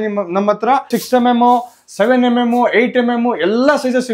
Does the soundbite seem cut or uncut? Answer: cut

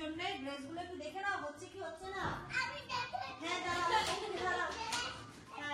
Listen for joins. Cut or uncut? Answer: uncut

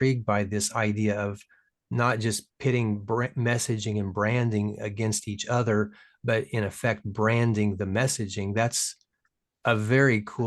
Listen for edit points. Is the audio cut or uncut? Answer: uncut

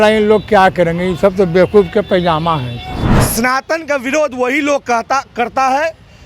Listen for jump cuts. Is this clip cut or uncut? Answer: cut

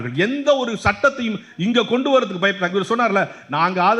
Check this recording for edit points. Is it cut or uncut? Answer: uncut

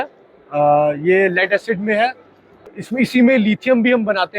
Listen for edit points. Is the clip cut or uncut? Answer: cut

